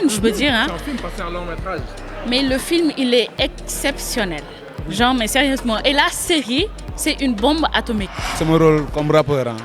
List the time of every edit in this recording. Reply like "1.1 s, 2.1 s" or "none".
8.4 s